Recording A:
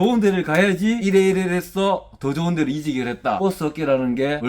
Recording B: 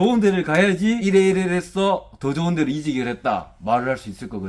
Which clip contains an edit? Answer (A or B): A